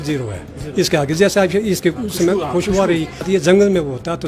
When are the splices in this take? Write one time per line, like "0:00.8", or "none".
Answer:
0:03.2